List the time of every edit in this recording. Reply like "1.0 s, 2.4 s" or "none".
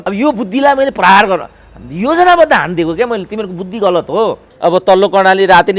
4.5 s